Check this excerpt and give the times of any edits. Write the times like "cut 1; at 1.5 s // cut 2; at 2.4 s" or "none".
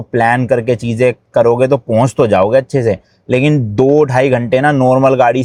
none